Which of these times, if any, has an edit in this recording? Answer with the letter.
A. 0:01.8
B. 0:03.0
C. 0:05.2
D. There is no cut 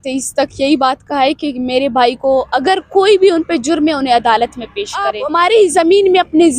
C